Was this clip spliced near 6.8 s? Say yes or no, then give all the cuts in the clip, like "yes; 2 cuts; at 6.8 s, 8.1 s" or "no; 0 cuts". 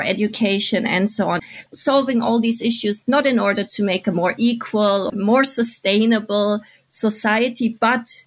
no; 2 cuts; at 1.4 s, 5.1 s